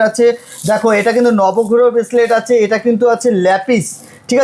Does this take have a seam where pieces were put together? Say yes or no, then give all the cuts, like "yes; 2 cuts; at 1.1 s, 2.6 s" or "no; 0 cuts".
no; 0 cuts